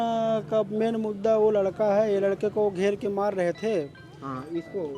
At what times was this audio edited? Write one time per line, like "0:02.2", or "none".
none